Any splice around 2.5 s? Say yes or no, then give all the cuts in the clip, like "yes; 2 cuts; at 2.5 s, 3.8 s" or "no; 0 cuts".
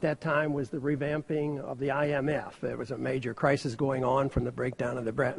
no; 1 cut; at 3.7 s